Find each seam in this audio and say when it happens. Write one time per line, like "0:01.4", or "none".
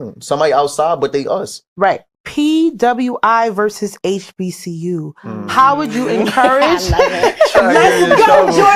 0:02.1